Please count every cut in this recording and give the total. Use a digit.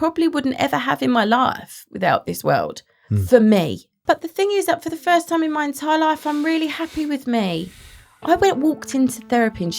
1